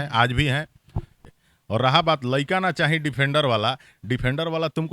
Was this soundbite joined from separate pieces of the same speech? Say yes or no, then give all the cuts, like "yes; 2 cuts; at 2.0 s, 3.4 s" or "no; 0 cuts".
yes; 1 cut; at 1.2 s